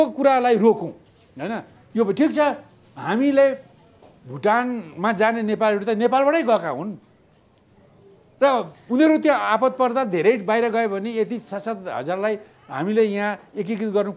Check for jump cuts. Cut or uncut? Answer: uncut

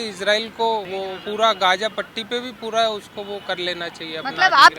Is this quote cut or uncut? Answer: cut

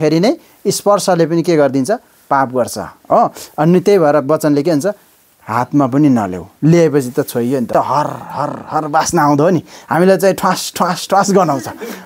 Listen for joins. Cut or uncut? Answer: cut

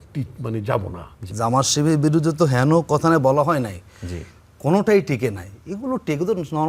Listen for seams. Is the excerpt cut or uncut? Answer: cut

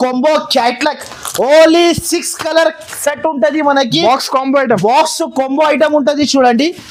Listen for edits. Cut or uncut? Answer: uncut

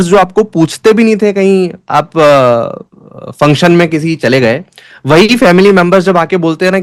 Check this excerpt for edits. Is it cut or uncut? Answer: uncut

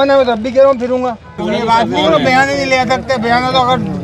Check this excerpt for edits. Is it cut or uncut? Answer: cut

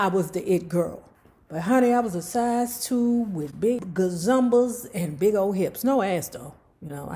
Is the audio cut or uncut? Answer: cut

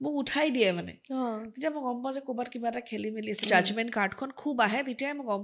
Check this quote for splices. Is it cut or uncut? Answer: cut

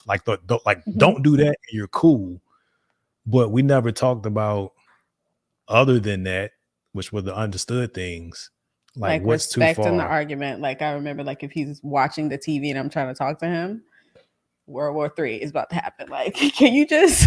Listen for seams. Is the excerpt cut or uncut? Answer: uncut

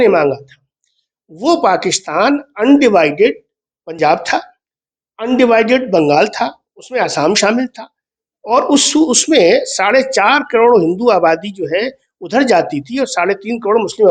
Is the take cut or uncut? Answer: uncut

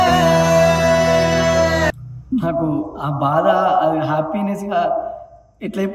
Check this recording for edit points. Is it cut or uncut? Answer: uncut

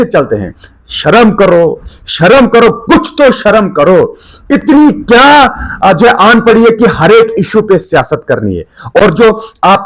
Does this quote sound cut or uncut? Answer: uncut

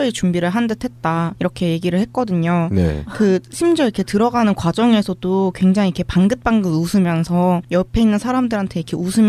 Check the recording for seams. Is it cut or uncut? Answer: uncut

